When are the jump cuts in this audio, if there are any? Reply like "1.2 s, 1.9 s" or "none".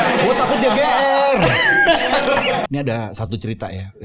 2.6 s